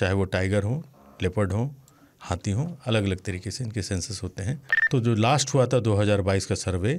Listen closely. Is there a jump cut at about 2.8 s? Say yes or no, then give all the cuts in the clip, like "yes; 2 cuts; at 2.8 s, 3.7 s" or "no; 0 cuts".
no; 1 cut; at 4.7 s